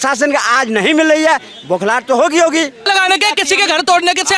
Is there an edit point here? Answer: yes; 1 cut; at 2.9 s

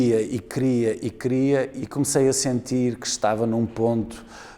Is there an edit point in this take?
yes; 1 cut; at 1.7 s

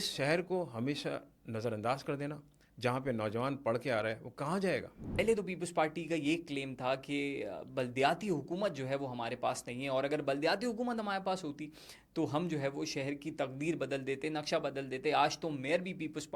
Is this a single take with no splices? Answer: no; 1 cut; at 5.2 s

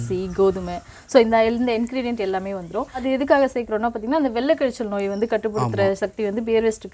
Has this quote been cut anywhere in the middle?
yes; 1 cut; at 3.0 s

